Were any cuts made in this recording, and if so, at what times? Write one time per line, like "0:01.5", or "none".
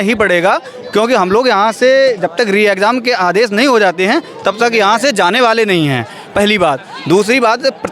none